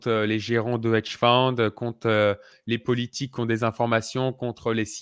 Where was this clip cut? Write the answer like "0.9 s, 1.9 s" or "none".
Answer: none